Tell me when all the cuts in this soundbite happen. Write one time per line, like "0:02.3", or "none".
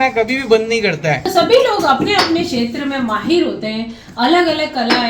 0:01.3